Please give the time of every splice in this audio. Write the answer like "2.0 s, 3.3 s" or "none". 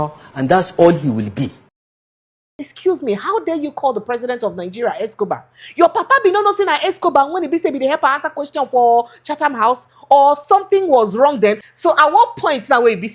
1.9 s, 11.6 s